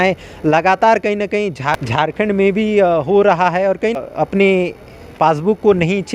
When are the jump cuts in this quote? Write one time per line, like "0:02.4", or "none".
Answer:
0:01.8
0:04.0